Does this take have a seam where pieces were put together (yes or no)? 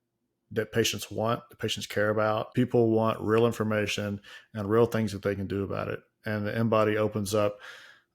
yes